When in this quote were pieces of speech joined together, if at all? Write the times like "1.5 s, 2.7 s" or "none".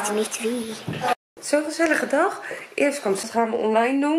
1.1 s, 3.2 s

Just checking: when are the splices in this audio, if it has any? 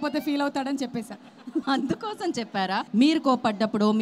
1.6 s, 2.9 s

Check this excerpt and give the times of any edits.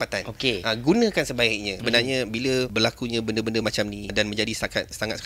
1.7 s, 2.7 s, 4.1 s

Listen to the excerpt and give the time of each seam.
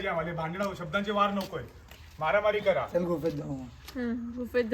none

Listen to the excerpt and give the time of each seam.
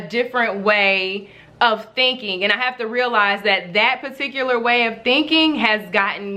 none

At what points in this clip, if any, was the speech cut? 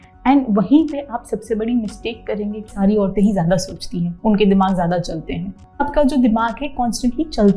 2.7 s, 5.8 s

